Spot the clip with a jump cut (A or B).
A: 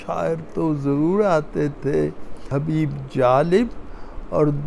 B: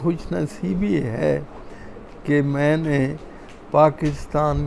A